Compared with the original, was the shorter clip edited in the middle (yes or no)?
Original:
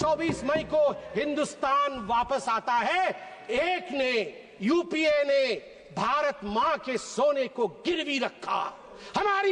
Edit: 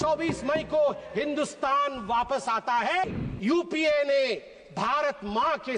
yes